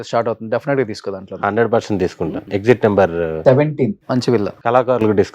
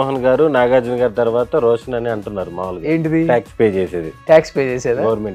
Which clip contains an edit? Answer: first; 2 cuts; at 2.4 s, 4.5 s

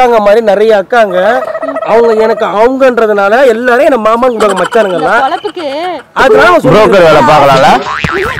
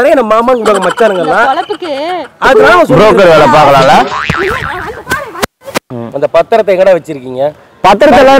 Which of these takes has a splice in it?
second; 1 cut; at 5.9 s

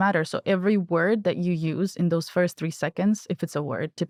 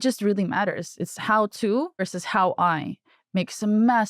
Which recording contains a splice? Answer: second; 1 cut; at 2.1 s

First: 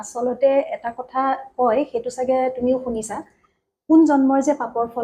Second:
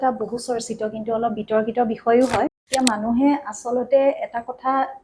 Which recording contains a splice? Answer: second; 1 cut; at 2.5 s

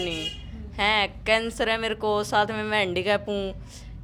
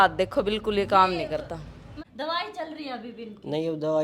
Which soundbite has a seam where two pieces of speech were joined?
second; 1 cut; at 2.0 s

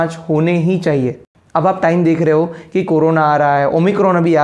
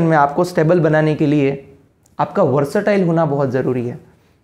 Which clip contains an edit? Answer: first; 1 cut; at 1.2 s

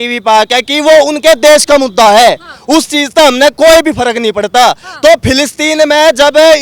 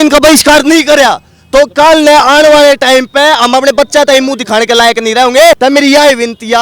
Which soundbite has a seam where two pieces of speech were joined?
second; 1 cut; at 5.6 s

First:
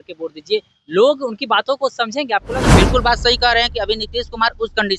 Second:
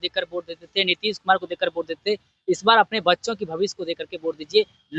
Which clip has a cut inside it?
first; 1 cut; at 2.7 s

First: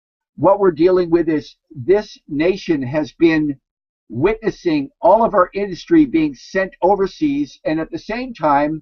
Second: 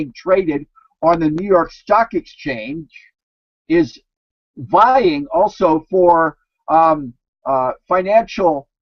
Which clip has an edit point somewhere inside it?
first; 1 cut; at 3.4 s

